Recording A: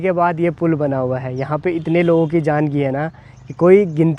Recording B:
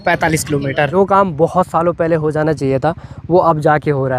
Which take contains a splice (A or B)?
B